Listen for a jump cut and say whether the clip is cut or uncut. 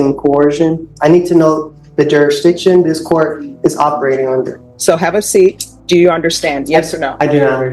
cut